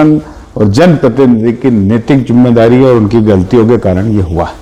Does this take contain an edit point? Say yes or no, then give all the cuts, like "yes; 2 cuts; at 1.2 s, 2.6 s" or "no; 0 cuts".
no; 0 cuts